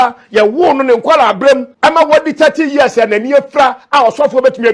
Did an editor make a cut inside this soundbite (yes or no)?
no